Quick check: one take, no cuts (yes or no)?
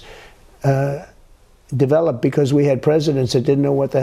yes